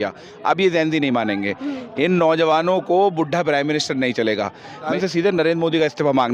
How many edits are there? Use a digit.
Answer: 1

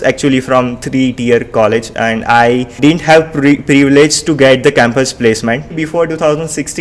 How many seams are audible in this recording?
2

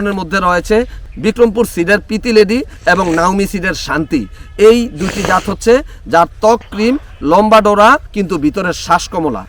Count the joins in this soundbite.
0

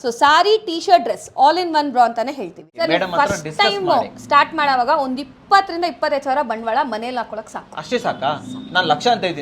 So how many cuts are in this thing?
1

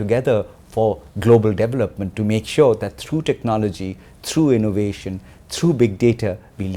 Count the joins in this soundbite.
1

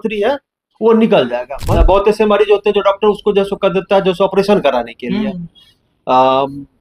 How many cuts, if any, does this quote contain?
1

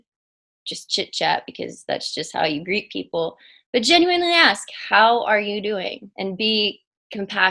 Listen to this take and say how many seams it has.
1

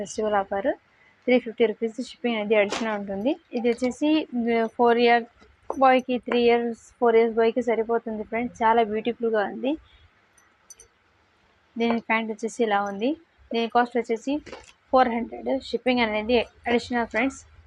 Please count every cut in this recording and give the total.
1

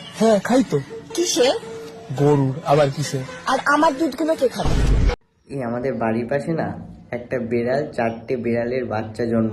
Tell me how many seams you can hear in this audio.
1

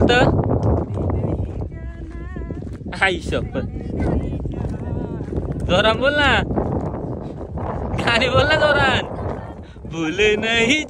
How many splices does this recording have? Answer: 0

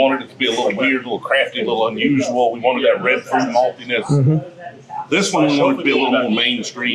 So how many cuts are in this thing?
0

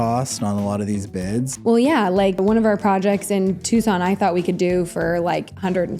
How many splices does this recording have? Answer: 2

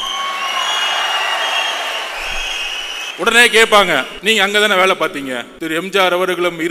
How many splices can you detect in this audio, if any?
3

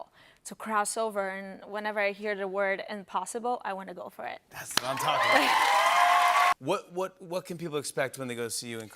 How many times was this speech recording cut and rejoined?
1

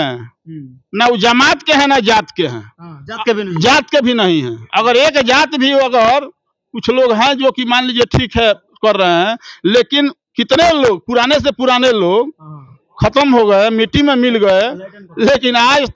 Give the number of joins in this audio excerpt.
0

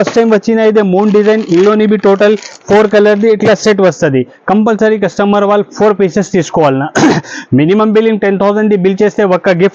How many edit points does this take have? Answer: 0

